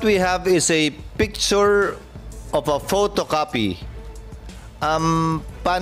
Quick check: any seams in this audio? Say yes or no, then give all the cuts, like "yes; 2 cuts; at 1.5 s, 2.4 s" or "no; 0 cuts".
no; 0 cuts